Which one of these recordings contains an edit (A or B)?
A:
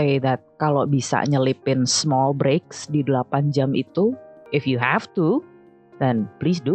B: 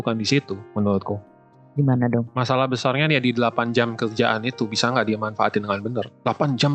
A